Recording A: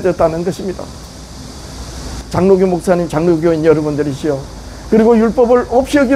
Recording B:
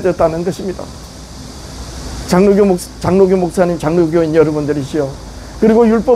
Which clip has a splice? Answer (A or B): A